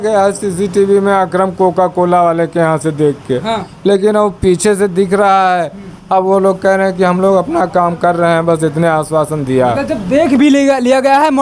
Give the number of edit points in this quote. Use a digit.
0